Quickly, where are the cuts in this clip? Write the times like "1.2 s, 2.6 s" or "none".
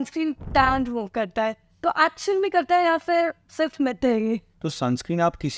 4.5 s